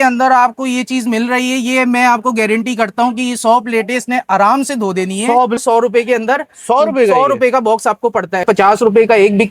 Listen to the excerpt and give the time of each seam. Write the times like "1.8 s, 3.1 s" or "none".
5.6 s, 8.4 s